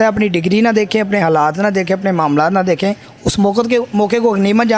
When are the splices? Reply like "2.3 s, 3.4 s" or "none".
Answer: none